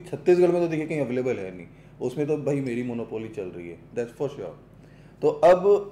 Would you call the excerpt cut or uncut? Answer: uncut